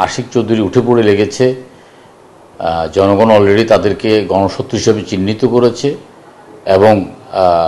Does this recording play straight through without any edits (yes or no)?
yes